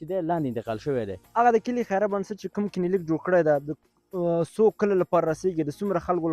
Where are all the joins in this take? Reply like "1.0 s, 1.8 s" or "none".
1.1 s